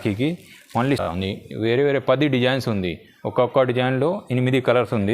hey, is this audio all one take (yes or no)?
no